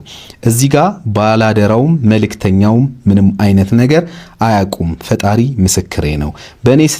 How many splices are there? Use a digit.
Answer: 0